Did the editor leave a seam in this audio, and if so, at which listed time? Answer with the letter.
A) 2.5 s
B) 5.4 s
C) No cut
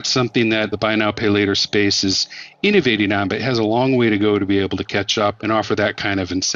B